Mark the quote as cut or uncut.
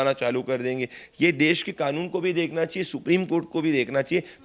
uncut